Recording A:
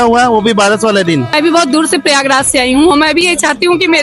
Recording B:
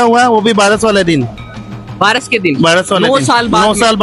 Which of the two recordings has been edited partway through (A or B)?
A